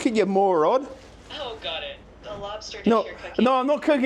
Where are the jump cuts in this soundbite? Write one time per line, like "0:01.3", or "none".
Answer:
0:01.1